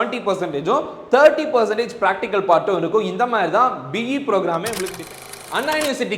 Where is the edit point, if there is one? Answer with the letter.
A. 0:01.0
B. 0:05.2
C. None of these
B